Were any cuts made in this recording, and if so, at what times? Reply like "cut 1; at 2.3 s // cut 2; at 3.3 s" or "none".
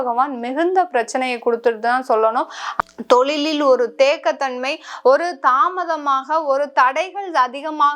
cut 1; at 2.6 s